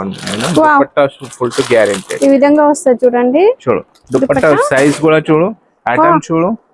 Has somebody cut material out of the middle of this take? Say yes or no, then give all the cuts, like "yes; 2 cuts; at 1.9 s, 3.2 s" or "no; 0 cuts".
no; 0 cuts